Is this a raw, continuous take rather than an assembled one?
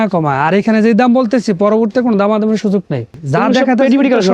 no; 1 cut; at 3.2 s

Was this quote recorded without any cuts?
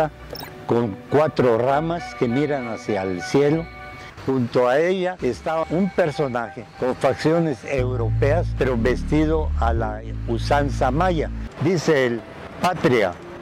no; 2 cuts; at 4.1 s, 11.4 s

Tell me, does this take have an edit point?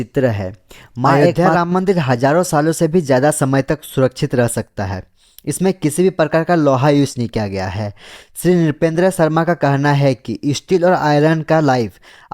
yes; 1 cut; at 1.2 s

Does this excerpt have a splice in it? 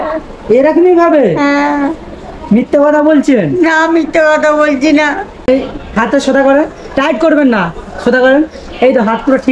yes; 1 cut; at 5.5 s

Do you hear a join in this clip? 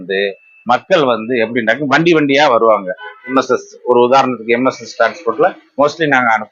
yes; 1 cut; at 3.3 s

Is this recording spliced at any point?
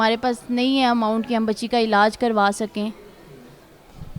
no; 0 cuts

